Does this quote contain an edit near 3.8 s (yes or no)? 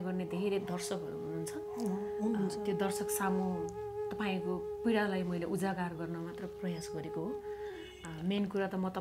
no